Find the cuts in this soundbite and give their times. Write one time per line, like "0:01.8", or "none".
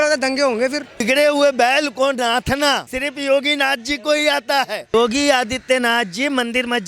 0:01.0
0:02.9
0:04.9